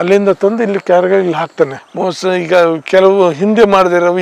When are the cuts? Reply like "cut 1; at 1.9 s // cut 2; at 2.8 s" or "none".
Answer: cut 1; at 1.9 s